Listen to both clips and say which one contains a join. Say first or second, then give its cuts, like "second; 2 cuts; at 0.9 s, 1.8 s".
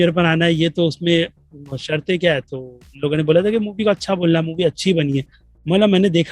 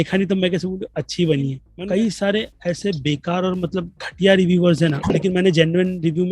second; 2 cuts; at 1.7 s, 5.1 s